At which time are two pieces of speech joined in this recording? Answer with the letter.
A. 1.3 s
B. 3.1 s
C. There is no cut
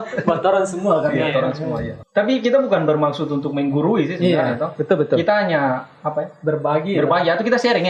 C